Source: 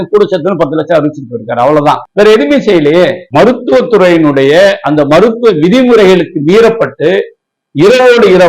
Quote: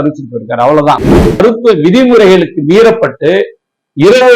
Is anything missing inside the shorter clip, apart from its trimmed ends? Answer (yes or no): yes